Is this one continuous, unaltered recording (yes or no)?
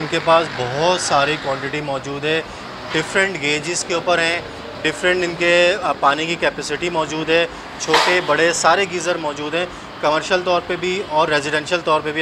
yes